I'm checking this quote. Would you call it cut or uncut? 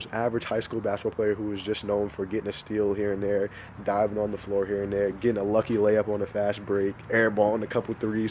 uncut